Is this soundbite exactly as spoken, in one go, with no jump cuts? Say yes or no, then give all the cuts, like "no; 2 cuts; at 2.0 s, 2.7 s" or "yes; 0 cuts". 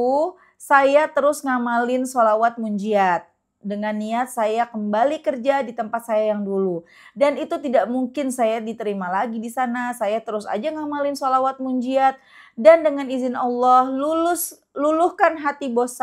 yes; 0 cuts